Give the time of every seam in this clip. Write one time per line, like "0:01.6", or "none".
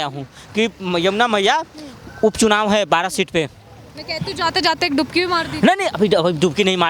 none